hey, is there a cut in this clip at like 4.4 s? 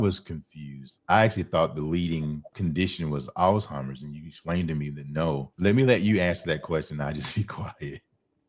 no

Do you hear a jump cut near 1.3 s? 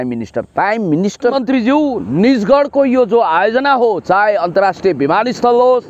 yes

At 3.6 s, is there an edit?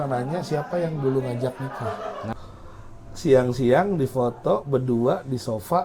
no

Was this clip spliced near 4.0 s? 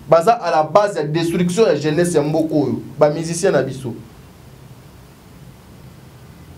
no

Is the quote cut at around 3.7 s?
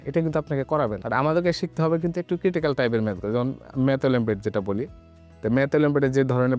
no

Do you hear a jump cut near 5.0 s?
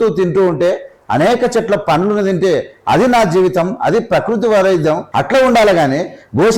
yes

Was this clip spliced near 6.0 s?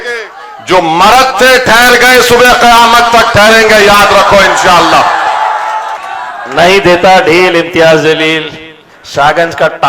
yes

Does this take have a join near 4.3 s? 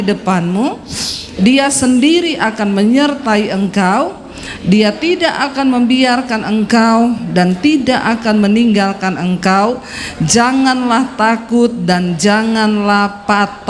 no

